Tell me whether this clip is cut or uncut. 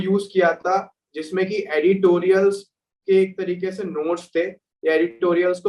uncut